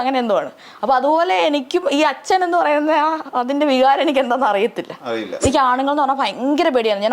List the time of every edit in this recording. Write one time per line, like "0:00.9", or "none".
0:05.3